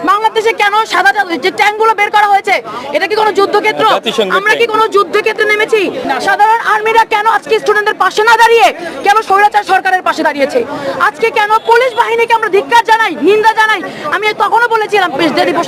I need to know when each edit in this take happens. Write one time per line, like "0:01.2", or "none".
0:06.0

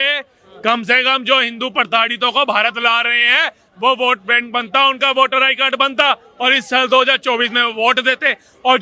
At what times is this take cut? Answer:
none

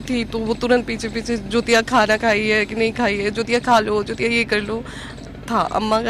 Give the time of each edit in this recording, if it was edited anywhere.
none

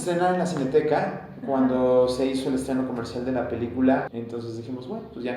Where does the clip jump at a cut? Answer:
0:04.1

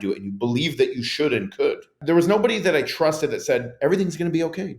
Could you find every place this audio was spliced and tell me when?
0:02.0

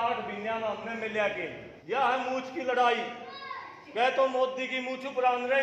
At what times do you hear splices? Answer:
0:01.7

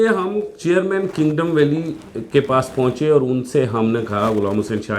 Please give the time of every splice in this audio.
none

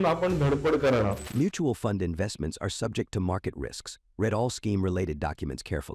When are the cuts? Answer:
0:01.2

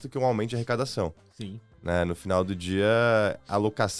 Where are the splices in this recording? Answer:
none

